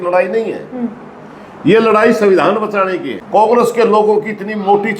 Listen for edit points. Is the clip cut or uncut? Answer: cut